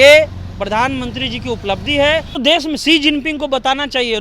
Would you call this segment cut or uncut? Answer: cut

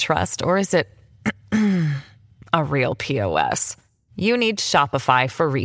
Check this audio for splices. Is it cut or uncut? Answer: uncut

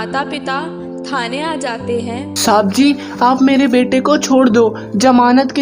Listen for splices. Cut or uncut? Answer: uncut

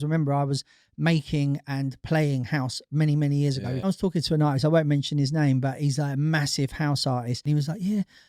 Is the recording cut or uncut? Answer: cut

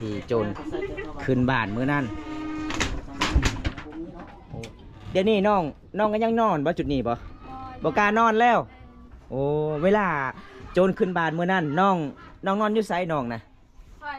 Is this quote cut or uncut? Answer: uncut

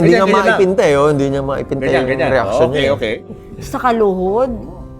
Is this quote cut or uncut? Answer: cut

